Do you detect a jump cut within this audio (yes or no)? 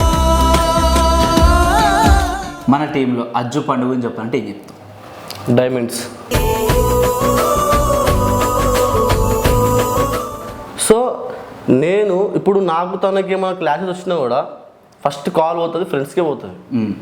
yes